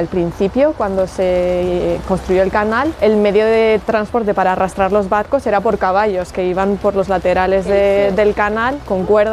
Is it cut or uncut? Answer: cut